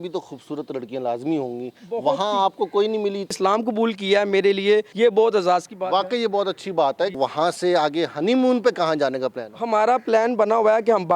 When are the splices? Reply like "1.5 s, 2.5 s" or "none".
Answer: 3.4 s, 4.9 s, 7.1 s